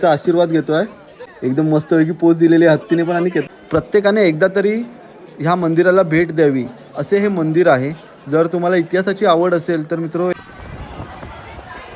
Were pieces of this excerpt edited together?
yes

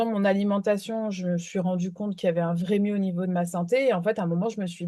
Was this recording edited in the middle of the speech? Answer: no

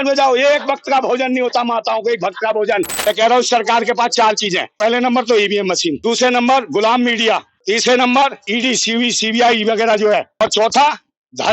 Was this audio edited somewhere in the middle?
yes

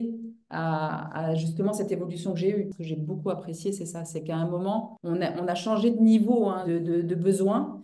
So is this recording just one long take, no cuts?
no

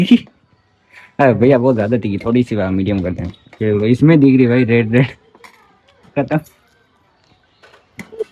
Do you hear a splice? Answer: no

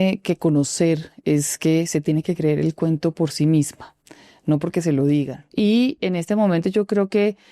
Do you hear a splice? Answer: yes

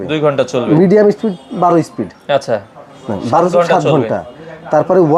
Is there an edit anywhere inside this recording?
no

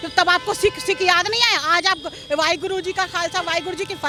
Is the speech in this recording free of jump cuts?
yes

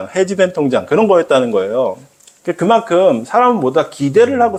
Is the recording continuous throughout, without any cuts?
yes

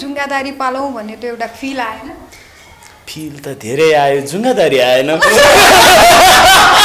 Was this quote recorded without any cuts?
yes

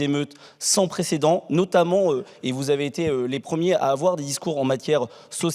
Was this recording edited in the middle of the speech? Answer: no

